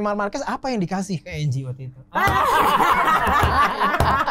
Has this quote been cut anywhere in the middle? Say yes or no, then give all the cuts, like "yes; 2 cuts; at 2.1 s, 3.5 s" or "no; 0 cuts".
no; 0 cuts